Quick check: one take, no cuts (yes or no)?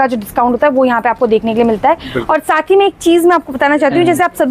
yes